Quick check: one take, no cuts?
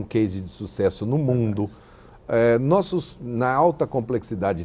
yes; 0 cuts

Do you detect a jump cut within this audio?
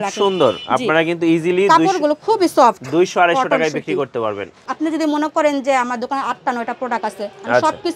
yes; 1 cut; at 4.6 s

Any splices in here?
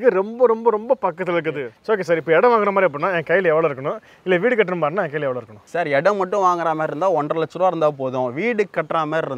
yes; 1 cut; at 1.7 s

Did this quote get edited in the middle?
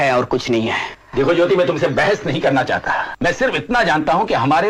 no; 0 cuts

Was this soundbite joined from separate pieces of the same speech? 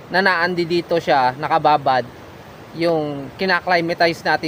no; 0 cuts

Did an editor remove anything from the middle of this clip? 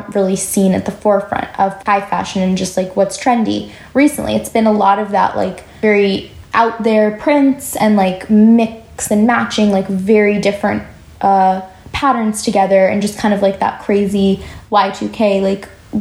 no; 0 cuts

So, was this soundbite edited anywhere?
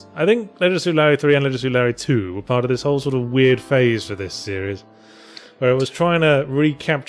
no; 0 cuts

